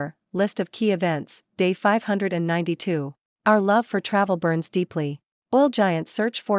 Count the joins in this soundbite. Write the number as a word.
one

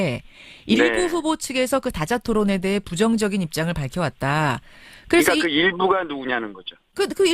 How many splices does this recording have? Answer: one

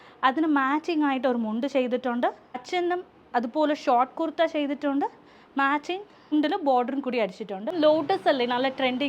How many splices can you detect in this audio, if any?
one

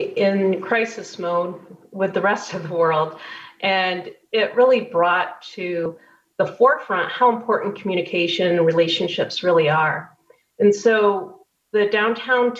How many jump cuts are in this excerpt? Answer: zero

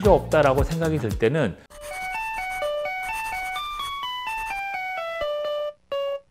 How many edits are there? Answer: one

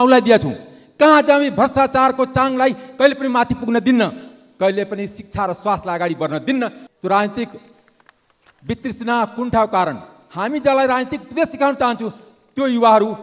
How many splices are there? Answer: one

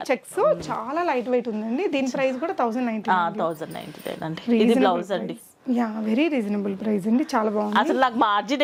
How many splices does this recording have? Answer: zero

